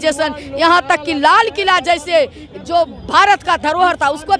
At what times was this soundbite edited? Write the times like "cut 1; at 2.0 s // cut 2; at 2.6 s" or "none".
none